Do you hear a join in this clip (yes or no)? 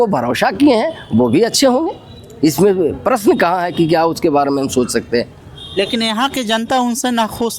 no